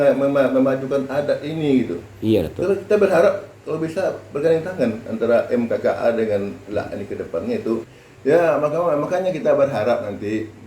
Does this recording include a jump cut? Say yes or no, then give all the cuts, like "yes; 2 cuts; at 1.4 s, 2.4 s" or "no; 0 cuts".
yes; 1 cut; at 7.9 s